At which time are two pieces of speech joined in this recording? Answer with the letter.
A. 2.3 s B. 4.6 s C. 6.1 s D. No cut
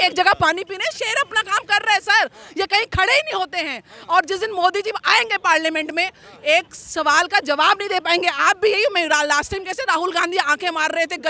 D